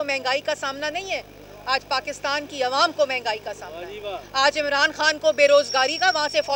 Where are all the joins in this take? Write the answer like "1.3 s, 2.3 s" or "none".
none

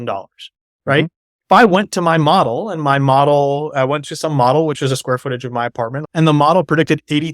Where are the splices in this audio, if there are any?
6.0 s

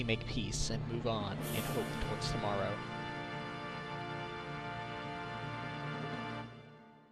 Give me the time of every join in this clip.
none

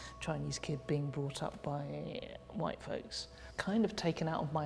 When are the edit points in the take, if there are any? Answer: none

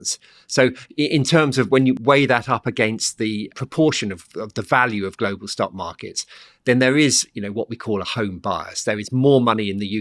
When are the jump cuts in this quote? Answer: 2.0 s, 3.5 s

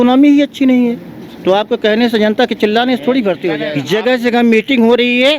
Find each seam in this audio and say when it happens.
3.7 s

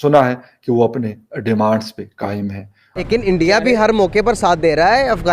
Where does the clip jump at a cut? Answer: 3.0 s

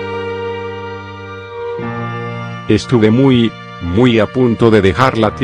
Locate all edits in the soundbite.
2.6 s

